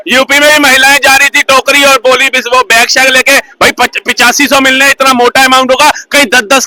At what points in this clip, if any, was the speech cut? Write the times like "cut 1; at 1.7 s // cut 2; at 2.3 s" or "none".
none